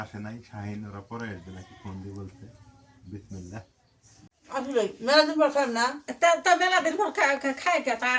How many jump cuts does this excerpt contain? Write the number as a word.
one